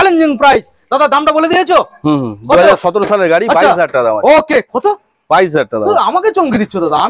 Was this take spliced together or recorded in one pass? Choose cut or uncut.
uncut